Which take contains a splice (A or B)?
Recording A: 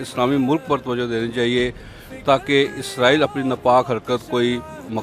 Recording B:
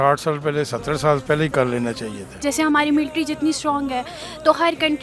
B